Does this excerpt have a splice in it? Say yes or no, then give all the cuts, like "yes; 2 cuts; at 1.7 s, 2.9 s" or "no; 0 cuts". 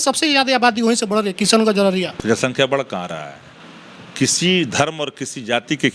yes; 1 cut; at 2.2 s